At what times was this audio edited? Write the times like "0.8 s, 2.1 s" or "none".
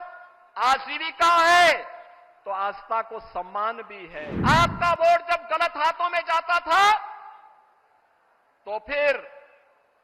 4.3 s